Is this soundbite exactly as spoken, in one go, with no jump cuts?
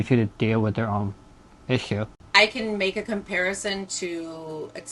no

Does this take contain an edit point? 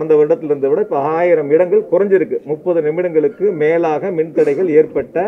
no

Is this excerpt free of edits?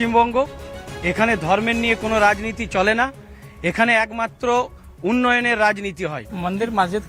yes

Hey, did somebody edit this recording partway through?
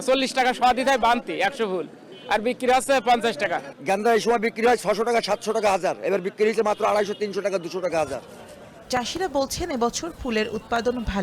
no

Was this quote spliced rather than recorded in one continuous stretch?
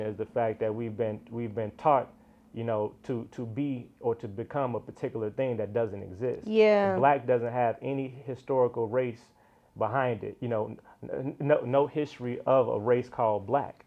no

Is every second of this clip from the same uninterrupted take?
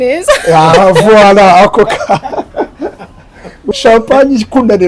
no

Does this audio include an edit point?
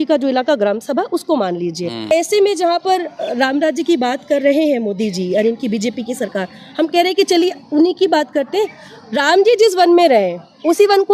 yes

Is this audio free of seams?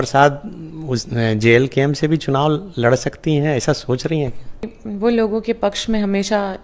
no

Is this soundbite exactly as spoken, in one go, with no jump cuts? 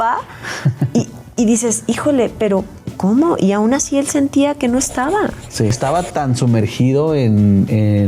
no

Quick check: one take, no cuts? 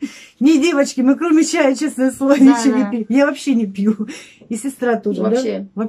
yes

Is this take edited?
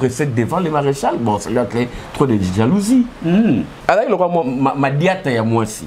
yes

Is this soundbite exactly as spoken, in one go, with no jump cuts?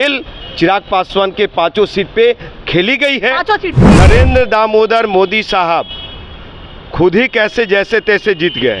no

